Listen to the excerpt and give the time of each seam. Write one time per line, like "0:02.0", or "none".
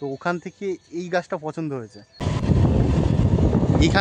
0:02.2